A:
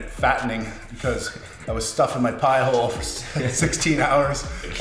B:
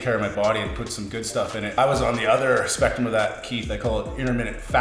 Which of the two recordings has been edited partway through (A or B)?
B